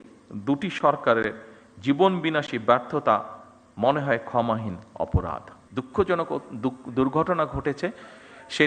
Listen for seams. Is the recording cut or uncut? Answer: cut